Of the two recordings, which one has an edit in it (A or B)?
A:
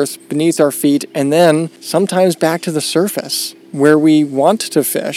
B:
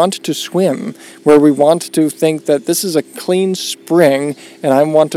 A